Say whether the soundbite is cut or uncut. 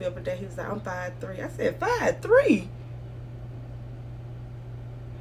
uncut